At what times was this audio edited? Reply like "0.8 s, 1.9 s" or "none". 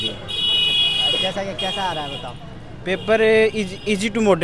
none